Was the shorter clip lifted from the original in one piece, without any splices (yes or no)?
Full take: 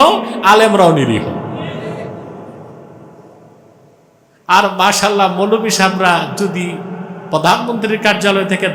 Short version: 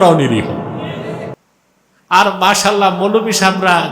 no